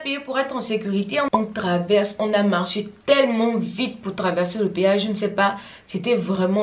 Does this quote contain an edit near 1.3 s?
yes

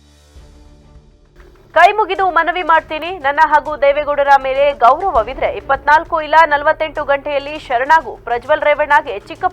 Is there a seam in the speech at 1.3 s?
yes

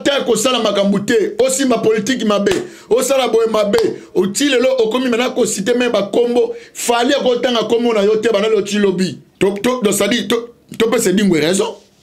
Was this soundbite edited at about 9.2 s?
yes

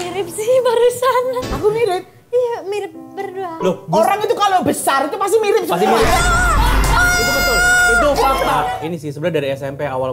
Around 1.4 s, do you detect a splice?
yes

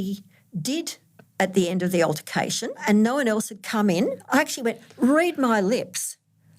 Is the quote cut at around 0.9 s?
no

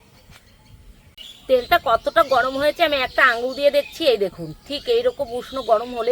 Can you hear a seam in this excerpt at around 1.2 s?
yes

